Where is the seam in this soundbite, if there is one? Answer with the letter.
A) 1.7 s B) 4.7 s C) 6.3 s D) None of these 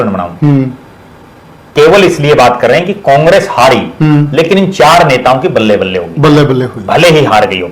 A